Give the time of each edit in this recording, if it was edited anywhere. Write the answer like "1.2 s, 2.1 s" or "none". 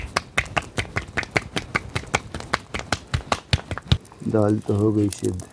4.1 s